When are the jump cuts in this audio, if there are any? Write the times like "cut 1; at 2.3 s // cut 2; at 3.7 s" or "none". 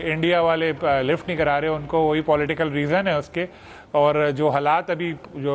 none

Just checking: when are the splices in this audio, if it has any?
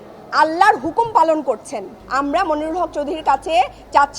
cut 1; at 2.0 s

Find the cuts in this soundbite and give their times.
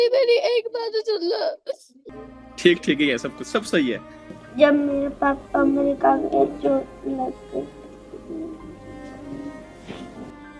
cut 1; at 1.9 s

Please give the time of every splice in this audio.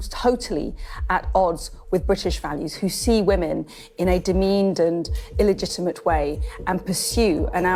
none

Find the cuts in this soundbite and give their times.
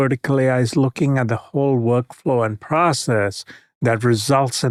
none

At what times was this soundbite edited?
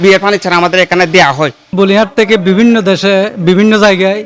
cut 1; at 1.6 s

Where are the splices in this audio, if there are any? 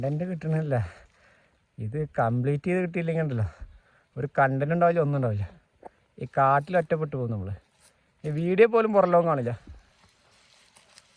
none

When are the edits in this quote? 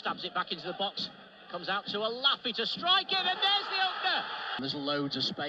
cut 1; at 4.6 s

